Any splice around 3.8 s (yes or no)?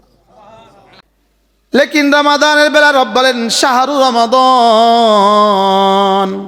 no